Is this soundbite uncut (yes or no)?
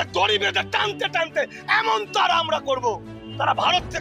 yes